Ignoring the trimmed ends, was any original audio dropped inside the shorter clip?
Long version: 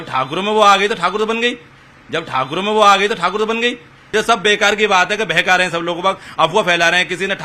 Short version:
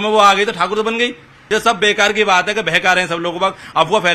yes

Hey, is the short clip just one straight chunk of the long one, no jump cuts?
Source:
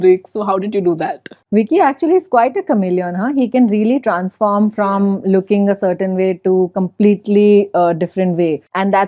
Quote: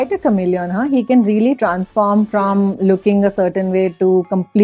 yes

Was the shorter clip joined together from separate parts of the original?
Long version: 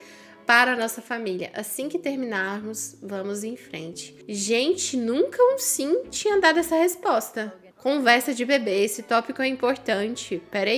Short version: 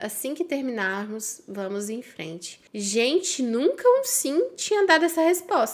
no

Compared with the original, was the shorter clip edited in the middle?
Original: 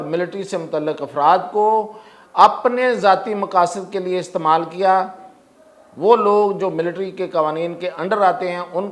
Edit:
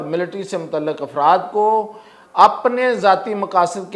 no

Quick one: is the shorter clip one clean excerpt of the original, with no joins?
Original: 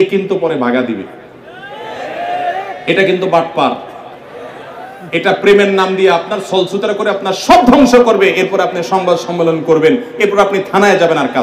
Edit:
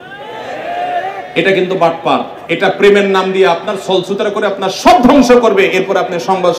no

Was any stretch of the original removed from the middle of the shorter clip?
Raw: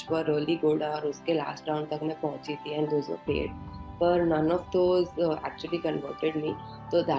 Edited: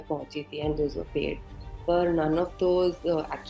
no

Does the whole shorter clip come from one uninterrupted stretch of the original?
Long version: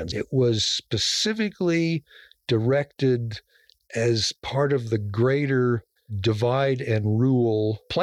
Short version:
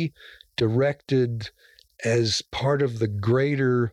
yes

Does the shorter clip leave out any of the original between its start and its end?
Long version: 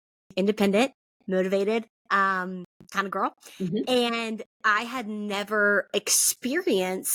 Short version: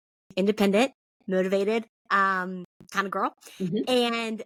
no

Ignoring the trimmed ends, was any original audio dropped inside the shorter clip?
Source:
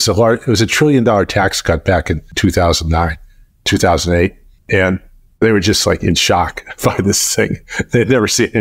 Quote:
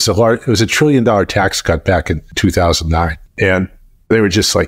yes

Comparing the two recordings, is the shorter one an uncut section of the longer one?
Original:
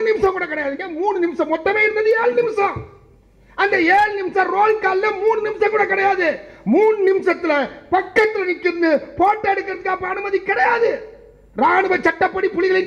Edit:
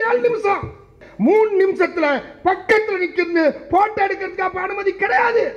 no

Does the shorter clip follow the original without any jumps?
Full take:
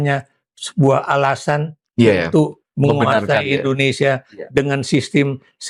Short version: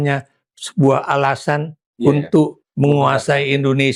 yes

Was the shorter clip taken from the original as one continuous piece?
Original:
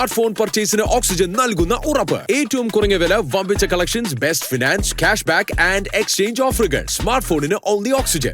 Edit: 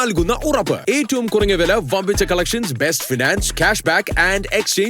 yes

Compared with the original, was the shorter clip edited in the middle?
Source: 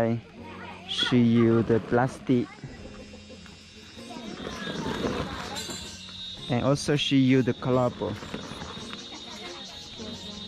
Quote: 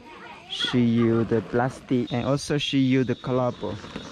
yes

